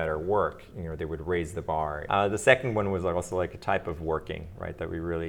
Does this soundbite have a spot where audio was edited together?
yes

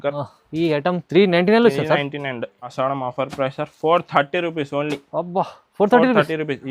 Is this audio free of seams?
no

